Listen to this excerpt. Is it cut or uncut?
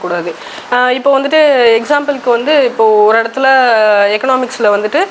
uncut